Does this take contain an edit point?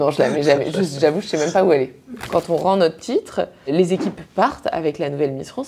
yes; 2 cuts; at 2.2 s, 3.7 s

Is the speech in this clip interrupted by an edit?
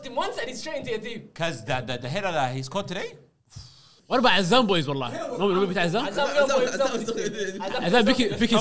yes; 1 cut; at 3.9 s

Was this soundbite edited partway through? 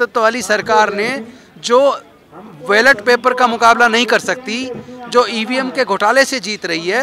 no; 0 cuts

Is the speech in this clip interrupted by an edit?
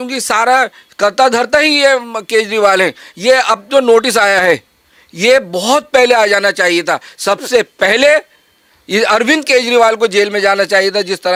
no; 0 cuts

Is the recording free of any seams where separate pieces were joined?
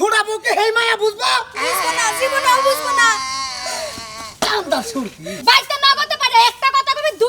no; 1 cut; at 5.3 s

